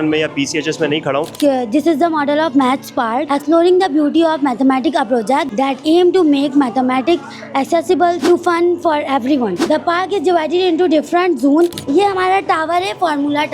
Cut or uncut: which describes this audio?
cut